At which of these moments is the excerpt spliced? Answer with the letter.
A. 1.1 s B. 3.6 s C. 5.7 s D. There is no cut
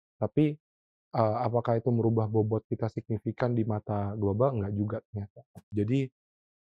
C